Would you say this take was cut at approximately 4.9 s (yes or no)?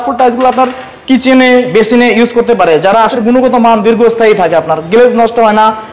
no